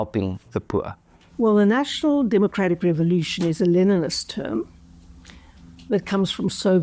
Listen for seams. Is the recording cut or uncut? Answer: uncut